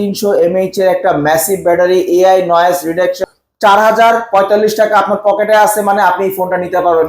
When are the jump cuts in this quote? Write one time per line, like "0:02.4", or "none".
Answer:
0:03.2